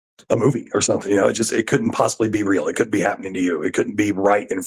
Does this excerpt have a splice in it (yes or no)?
no